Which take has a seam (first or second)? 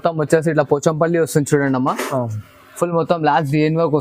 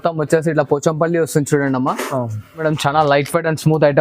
second